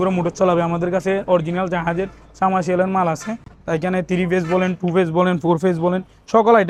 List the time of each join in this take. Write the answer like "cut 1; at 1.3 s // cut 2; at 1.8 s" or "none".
none